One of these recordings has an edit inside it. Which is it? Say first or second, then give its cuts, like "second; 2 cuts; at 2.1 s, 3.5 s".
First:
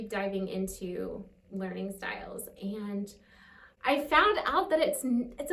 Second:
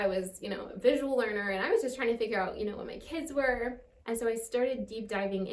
second; 1 cut; at 3.9 s